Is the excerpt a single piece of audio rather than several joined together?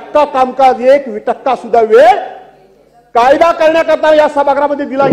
yes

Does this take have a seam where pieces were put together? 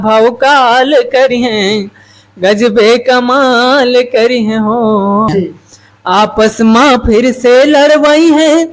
yes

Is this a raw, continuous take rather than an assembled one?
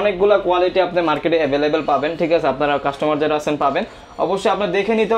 yes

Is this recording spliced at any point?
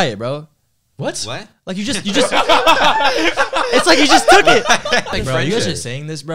yes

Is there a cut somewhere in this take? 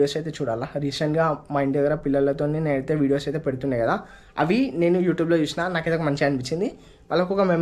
no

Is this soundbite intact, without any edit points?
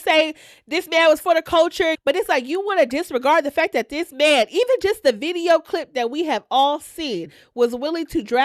no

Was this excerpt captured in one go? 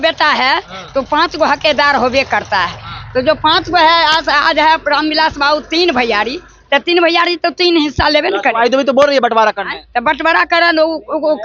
yes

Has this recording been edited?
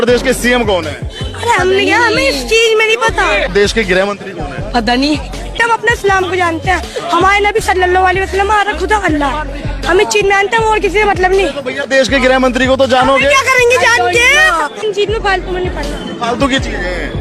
no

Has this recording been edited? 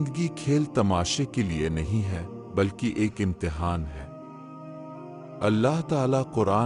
yes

